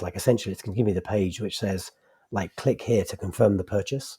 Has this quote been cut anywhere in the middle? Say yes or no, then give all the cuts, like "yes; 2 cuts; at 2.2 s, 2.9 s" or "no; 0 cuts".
no; 0 cuts